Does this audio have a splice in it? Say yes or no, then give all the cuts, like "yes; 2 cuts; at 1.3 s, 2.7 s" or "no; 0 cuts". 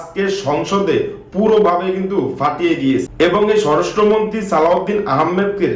yes; 1 cut; at 3.1 s